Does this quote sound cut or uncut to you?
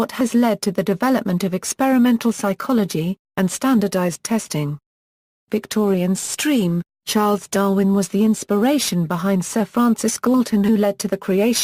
cut